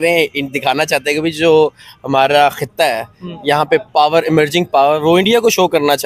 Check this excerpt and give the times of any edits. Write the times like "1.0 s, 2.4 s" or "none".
none